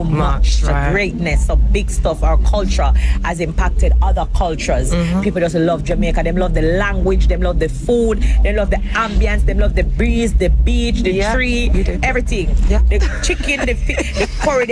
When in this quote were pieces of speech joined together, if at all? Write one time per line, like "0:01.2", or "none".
none

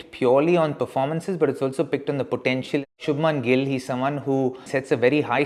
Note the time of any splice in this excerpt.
0:03.0
0:04.6

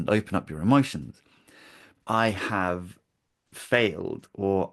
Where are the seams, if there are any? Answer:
0:01.9

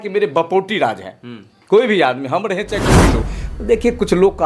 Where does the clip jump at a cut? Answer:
0:03.2

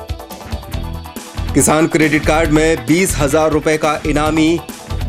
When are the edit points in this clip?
0:01.1

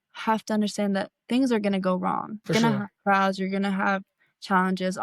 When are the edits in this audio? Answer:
0:02.5

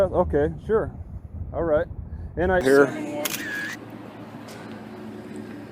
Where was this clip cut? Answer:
0:02.6

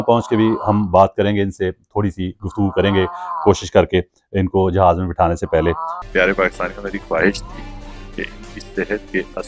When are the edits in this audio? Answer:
0:05.9

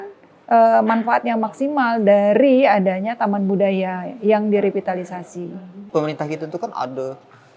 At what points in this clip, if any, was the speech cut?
0:05.9

